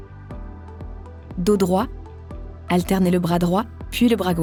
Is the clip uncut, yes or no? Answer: yes